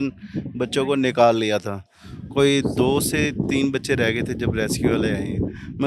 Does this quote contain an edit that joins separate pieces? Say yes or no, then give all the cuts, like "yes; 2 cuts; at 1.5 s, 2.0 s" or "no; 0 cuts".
no; 0 cuts